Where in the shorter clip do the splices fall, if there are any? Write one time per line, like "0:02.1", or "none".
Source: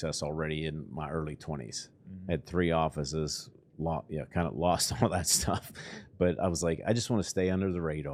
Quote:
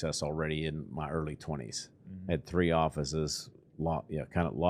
none